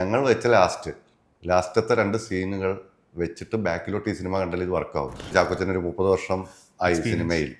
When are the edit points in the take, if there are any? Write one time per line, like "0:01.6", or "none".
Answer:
0:05.3